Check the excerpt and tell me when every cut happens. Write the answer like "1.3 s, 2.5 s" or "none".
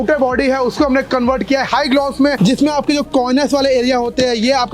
none